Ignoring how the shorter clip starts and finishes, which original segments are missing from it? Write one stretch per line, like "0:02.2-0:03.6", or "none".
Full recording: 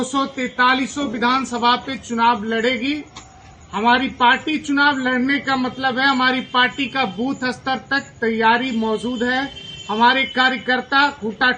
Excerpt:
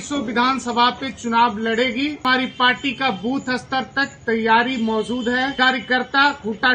0:03.1-0:06.2
0:09.5-0:10.3